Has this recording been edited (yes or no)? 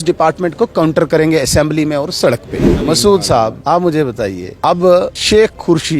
yes